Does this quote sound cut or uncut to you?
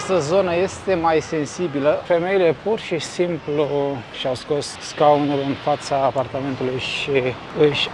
cut